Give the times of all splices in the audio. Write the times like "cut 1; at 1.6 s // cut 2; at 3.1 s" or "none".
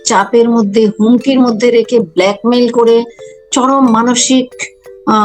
none